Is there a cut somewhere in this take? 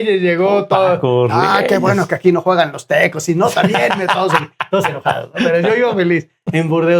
no; 0 cuts

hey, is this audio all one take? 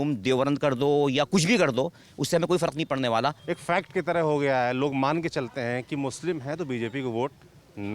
no; 1 cut; at 3.5 s

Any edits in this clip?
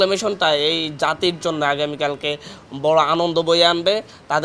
no; 0 cuts

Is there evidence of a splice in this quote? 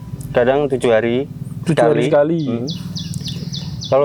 no; 0 cuts

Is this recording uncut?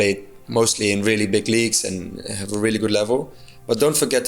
yes; 0 cuts

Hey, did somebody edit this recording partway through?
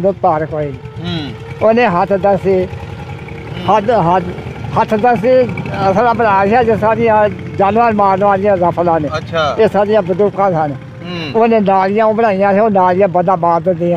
no; 0 cuts

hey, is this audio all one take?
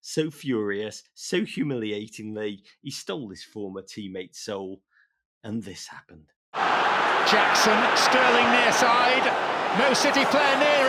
yes; 0 cuts

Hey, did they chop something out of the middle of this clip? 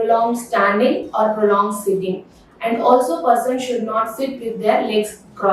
no; 0 cuts

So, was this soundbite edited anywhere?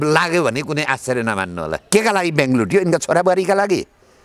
yes; 1 cut; at 1.7 s

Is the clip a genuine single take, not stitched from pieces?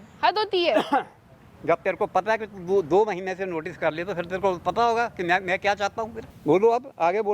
yes; 0 cuts

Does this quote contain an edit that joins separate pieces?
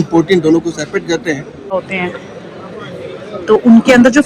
yes; 1 cut; at 1.8 s

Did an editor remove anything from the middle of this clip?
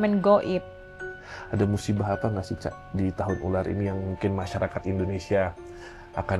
yes; 1 cut; at 1.3 s

